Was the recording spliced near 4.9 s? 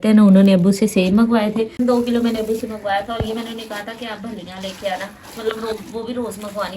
no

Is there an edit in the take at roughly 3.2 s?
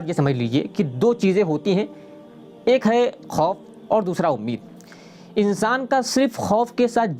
no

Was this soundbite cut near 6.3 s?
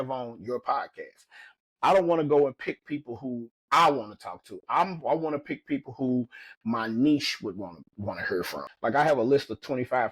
no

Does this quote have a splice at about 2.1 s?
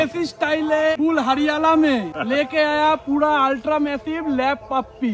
yes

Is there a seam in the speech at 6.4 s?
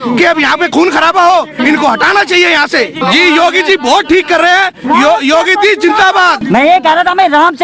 yes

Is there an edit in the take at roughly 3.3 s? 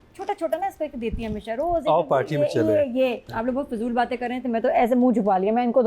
yes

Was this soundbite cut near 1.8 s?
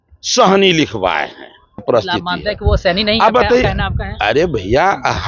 yes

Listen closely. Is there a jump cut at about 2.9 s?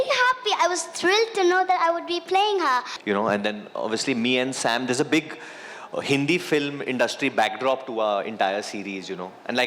yes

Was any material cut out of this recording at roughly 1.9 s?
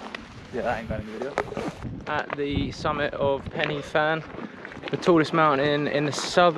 yes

